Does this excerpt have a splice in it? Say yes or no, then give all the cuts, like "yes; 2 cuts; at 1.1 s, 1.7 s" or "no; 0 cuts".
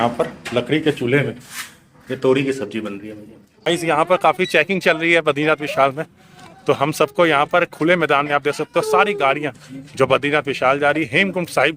yes; 1 cut; at 3.7 s